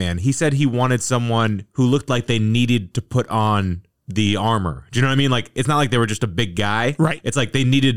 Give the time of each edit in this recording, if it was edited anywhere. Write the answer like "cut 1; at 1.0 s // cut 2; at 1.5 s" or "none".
none